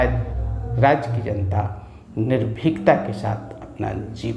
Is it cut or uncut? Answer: uncut